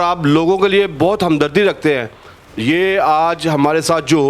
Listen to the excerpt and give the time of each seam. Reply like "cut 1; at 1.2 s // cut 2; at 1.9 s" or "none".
none